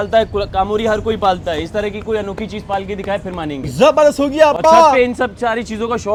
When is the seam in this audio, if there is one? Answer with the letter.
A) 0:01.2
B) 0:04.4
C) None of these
C